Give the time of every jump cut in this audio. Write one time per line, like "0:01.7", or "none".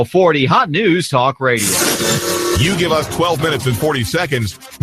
0:01.7